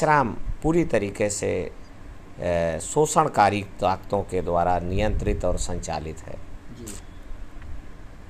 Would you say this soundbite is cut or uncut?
uncut